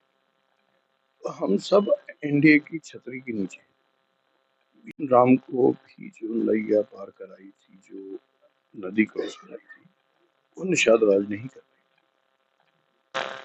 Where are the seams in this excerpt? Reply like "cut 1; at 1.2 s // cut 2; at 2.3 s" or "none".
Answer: cut 1; at 4.9 s